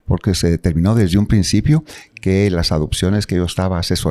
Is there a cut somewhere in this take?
no; 0 cuts

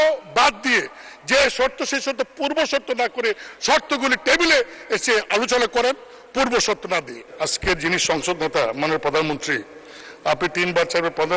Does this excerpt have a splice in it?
yes; 1 cut; at 7.2 s

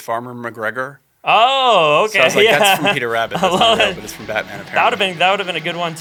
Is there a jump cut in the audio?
no; 0 cuts

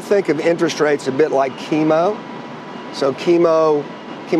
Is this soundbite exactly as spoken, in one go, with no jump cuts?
yes; 0 cuts

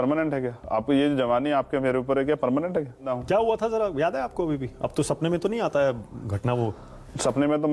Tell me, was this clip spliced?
yes; 1 cut; at 3.1 s

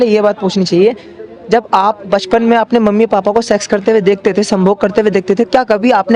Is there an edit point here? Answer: no; 0 cuts

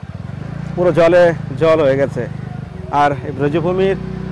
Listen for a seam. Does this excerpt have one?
no; 0 cuts

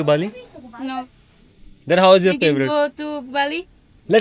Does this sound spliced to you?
no; 0 cuts

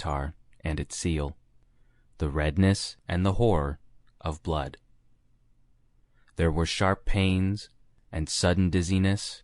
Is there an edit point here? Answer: yes; 1 cut; at 3.2 s

